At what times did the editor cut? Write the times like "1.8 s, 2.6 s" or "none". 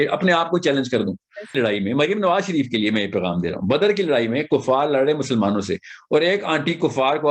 1.5 s